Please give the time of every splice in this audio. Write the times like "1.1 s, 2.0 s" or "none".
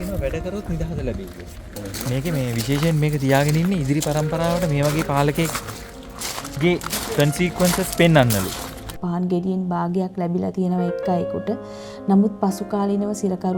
1.8 s, 8.9 s